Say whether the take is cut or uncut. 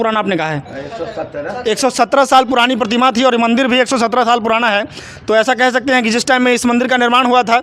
uncut